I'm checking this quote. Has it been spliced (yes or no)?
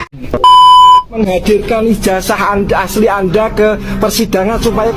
yes